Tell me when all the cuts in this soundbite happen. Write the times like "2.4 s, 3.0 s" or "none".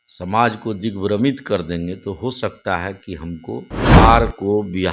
4.0 s